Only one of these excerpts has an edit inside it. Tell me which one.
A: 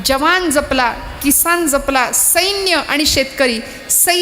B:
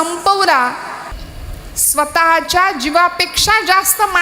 B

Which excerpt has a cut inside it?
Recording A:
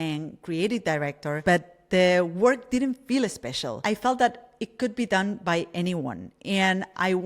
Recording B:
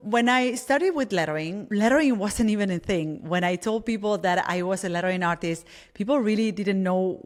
A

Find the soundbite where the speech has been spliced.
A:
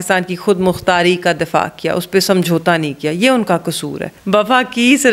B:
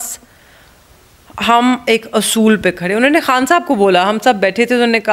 A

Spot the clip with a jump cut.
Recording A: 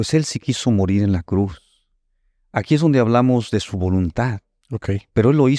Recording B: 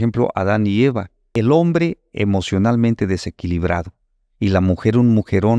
B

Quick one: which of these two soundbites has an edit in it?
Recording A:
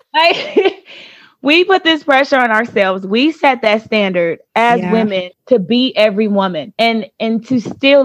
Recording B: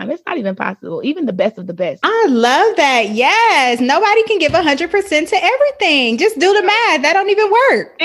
A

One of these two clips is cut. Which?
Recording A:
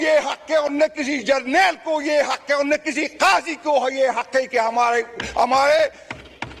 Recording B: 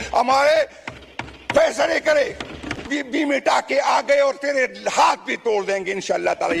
B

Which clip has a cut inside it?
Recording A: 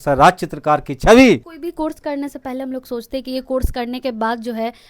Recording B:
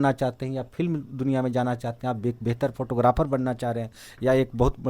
A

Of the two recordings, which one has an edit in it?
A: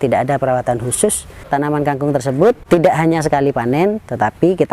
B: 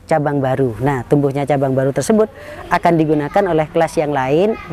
A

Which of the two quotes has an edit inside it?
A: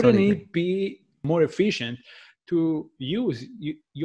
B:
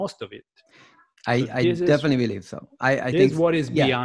A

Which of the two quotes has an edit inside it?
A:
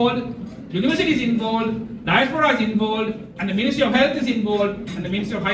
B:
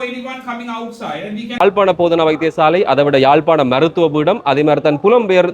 B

